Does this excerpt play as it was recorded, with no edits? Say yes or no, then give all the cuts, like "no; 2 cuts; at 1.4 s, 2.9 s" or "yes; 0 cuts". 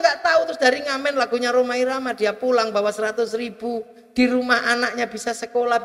yes; 0 cuts